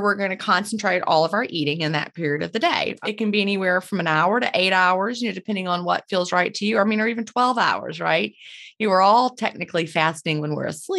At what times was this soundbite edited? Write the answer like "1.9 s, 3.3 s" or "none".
2.9 s